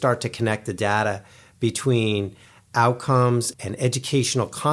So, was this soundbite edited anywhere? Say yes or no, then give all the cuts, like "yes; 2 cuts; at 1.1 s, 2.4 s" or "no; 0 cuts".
yes; 1 cut; at 3.5 s